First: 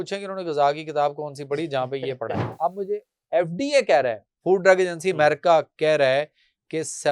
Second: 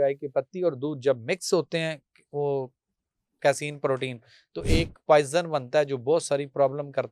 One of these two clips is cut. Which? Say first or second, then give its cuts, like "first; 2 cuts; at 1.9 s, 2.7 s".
first; 1 cut; at 2.5 s